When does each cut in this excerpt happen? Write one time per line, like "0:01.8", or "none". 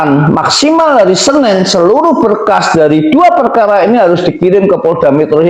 none

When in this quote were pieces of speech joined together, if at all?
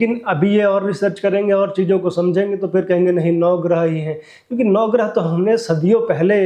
none

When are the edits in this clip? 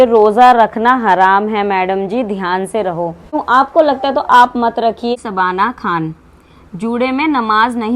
0:03.4
0:05.1

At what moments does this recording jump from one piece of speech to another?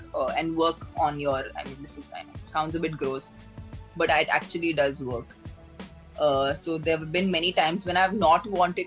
none

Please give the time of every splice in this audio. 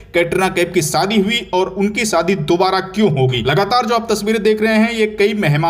0:03.4

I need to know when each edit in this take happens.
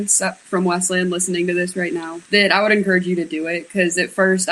0:02.2

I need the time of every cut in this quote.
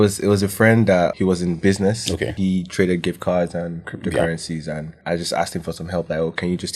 0:01.1
0:02.3
0:04.9

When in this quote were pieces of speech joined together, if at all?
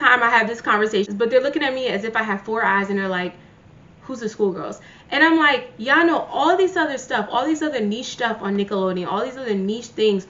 0:01.1

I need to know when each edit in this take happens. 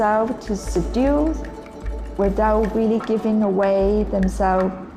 none

